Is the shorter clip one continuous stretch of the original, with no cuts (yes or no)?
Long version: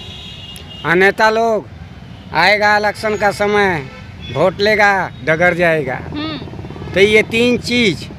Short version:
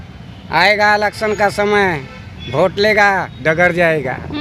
yes